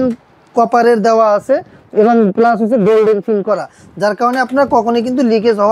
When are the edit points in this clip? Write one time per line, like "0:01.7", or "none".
none